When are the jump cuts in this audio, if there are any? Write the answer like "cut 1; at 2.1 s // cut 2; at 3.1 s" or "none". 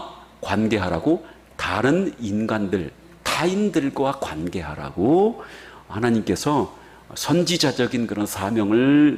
none

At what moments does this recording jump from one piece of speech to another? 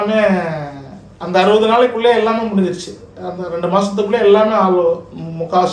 none

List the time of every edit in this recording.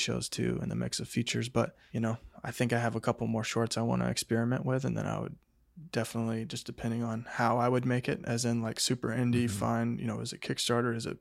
cut 1; at 1.8 s

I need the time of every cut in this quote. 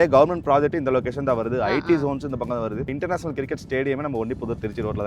cut 1; at 2.9 s

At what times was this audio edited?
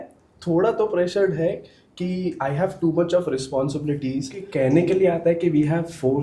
none

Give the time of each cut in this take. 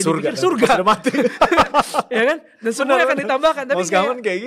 none

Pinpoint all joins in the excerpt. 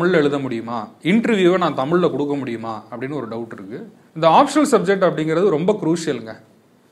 cut 1; at 4.0 s

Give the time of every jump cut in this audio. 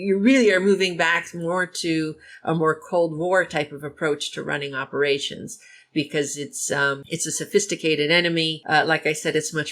cut 1; at 7.0 s // cut 2; at 8.6 s

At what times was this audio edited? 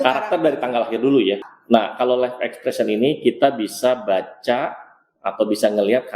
cut 1; at 1.5 s

